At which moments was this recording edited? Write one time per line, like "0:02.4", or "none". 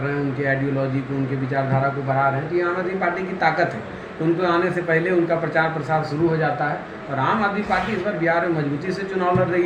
none